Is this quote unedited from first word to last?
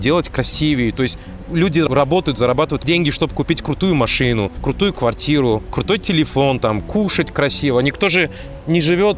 no; 4 cuts; at 1.9 s, 2.8 s, 4.6 s, 5.7 s

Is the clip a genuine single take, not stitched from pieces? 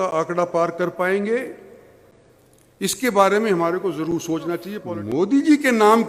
no; 1 cut; at 4.7 s

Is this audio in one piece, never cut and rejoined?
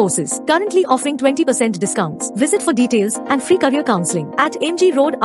yes; 0 cuts

